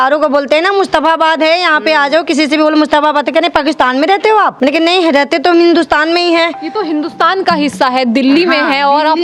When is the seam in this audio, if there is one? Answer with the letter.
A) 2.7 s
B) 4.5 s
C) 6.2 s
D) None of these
B